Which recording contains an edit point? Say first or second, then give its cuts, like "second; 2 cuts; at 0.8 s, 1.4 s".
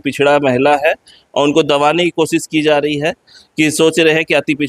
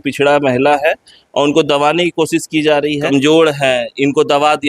second; 1 cut; at 3.1 s